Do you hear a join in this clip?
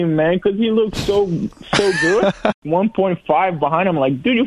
yes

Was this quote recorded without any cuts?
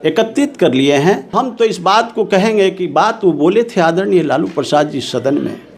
no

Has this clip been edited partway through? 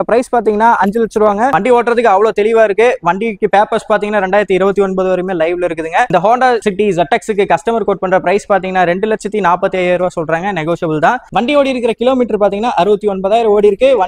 yes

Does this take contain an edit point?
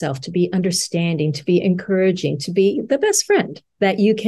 no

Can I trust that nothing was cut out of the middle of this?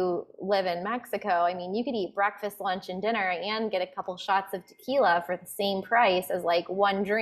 yes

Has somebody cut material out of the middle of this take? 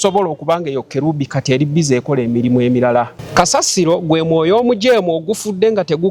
yes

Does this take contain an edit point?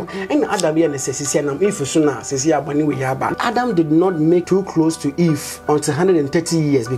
yes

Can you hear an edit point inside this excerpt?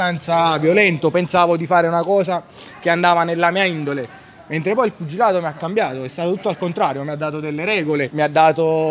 no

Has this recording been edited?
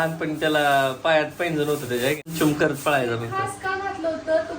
yes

